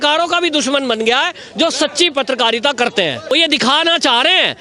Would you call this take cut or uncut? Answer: cut